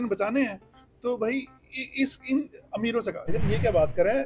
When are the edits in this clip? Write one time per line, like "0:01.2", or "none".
0:03.3